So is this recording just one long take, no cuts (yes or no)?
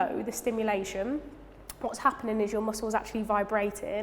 yes